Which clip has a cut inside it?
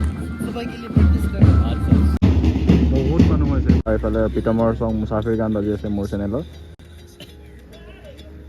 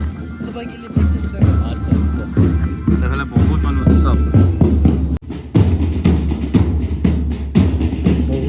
first; 2 cuts; at 2.2 s, 3.8 s

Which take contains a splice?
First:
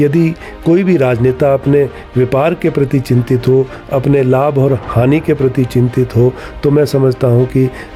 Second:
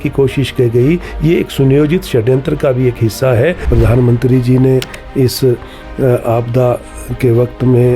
second; 1 cut; at 3.7 s

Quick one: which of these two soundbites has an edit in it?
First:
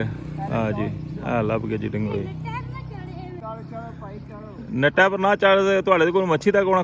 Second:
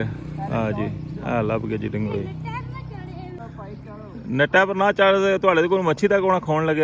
second; 1 cut; at 3.4 s

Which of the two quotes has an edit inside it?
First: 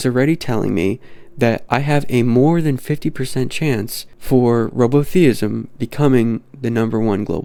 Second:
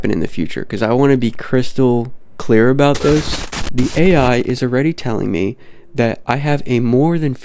second; 1 cut; at 3.6 s

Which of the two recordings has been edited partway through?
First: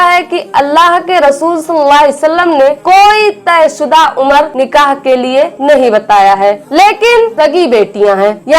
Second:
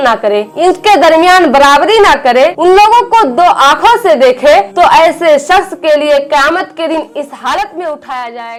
first; 3 cuts; at 4.5 s, 5.6 s, 7.3 s

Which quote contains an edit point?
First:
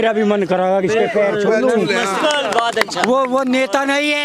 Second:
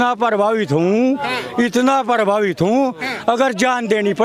first; 1 cut; at 2.2 s

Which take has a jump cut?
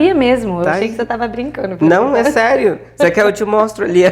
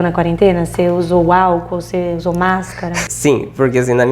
second; 1 cut; at 3.1 s

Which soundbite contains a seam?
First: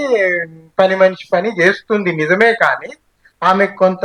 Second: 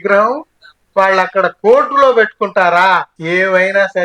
second; 1 cut; at 3.1 s

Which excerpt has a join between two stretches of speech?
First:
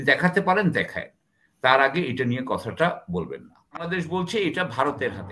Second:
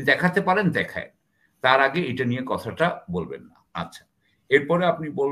first; 1 cut; at 3.8 s

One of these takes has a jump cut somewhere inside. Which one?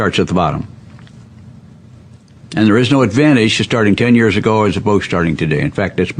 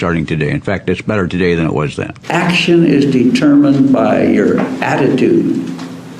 second; 1 cut; at 2.2 s

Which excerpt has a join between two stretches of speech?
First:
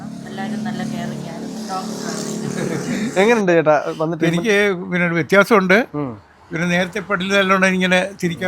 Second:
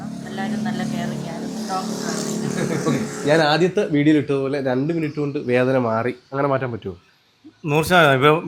first; 1 cut; at 3.0 s

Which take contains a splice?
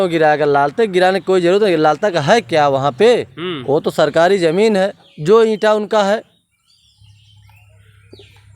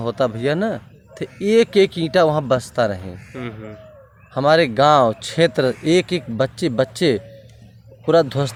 first; 1 cut; at 5.1 s

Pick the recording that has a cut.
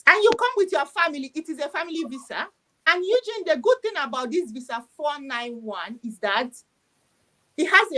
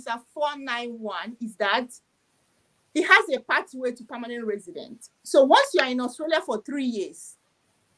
first; 1 cut; at 2.8 s

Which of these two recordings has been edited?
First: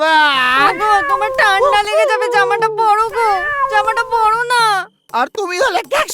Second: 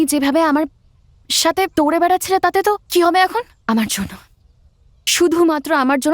second; 2 cuts; at 2.8 s, 3.5 s

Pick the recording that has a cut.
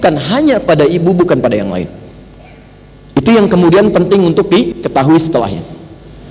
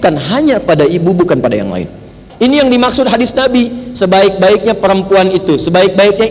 second; 1 cut; at 2.2 s

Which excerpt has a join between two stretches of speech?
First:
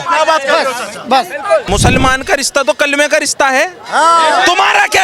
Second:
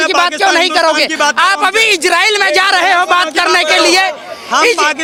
first; 1 cut; at 1.6 s

